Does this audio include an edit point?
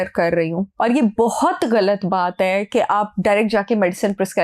no; 0 cuts

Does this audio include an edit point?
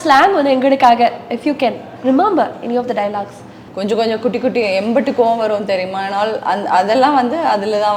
no; 0 cuts

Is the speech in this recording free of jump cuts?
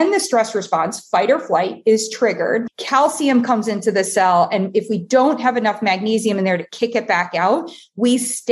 no; 1 cut; at 2.8 s

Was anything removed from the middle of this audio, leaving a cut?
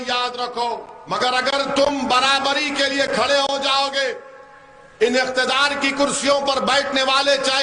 yes; 1 cut; at 1.0 s

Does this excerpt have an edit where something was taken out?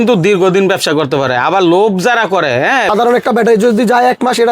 yes; 1 cut; at 2.9 s

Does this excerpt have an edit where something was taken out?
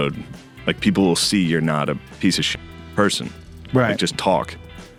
no; 0 cuts

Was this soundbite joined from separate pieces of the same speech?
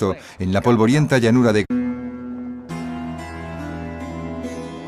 no; 0 cuts

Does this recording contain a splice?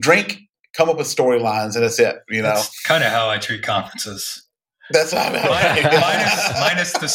no; 0 cuts

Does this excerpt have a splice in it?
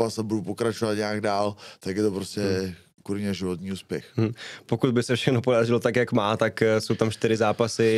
no; 0 cuts

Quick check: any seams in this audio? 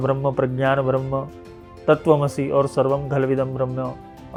no; 0 cuts

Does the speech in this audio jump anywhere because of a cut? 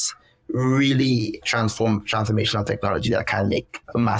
no; 0 cuts

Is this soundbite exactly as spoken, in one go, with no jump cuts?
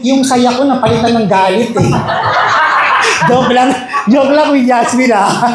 yes; 0 cuts

